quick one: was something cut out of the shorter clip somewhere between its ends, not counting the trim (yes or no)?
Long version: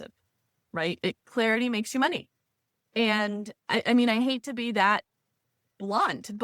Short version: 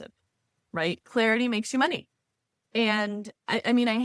yes